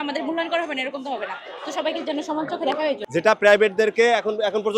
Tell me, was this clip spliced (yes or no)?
yes